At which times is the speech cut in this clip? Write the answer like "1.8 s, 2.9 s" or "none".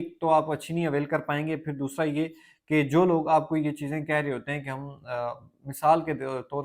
none

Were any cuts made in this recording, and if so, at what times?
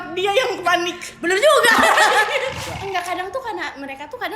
2.6 s

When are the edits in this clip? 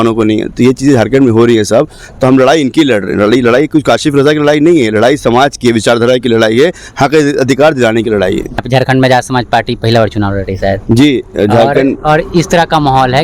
8.6 s

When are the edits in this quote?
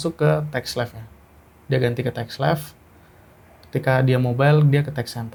none

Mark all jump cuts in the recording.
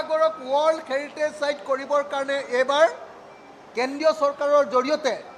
none

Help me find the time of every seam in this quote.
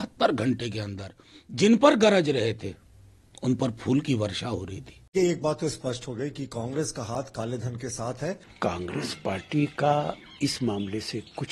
5.1 s, 8.5 s

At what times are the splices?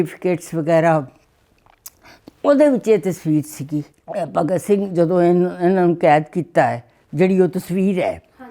4.0 s

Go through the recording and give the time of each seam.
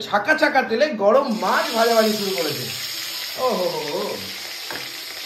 none

